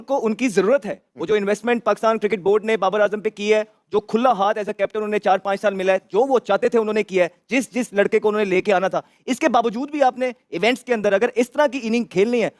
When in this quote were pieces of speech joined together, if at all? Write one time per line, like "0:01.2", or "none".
none